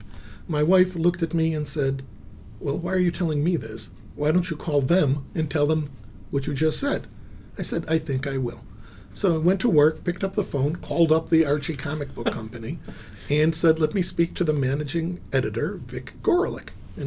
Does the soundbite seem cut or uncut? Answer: uncut